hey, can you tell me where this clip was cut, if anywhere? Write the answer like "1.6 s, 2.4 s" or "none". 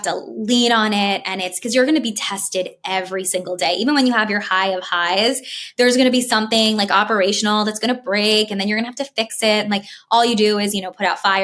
none